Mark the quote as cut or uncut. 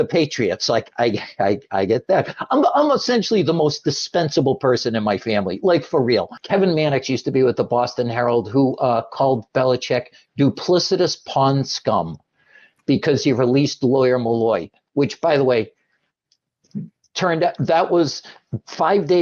cut